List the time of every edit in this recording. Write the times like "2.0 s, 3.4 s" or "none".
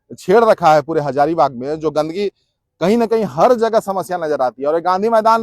none